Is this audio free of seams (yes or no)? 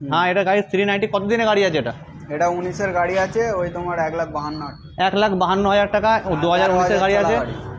yes